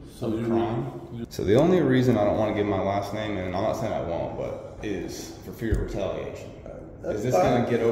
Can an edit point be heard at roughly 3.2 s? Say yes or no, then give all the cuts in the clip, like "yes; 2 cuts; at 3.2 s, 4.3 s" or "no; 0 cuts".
no; 1 cut; at 1.1 s